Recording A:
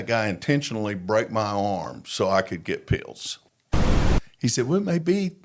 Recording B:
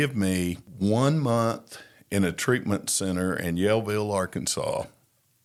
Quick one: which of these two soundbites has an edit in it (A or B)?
A